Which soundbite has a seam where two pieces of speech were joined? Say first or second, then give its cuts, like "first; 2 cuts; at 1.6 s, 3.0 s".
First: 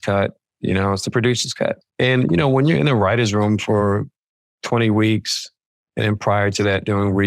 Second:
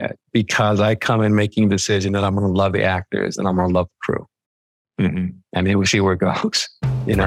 first; 1 cut; at 1.9 s